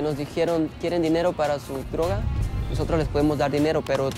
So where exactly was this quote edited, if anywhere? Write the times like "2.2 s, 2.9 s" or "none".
2.3 s